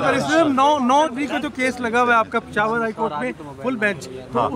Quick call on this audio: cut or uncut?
cut